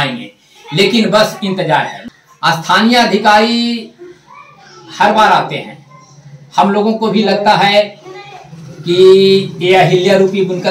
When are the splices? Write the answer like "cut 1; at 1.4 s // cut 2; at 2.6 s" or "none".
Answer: cut 1; at 2.0 s